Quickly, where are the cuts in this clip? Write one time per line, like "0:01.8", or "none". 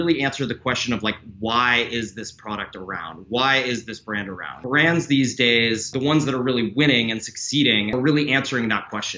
0:04.5
0:05.9
0:07.9